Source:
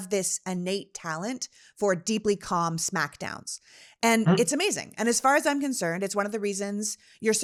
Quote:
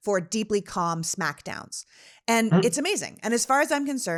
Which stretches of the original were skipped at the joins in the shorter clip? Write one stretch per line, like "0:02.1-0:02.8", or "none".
none